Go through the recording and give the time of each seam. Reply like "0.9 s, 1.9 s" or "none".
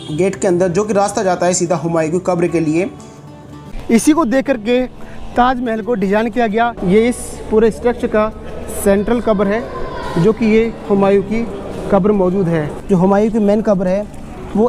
3.7 s, 6.7 s, 12.7 s